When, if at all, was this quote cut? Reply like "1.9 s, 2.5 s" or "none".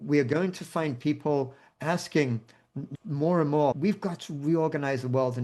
2.8 s, 3.8 s

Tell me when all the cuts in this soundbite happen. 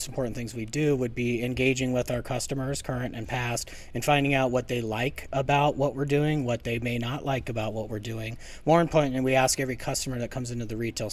none

